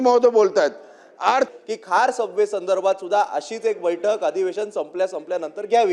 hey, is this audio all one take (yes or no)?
no